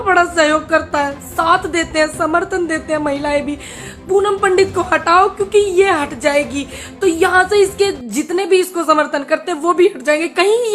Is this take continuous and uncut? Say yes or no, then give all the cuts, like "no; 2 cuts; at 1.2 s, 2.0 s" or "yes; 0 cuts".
yes; 0 cuts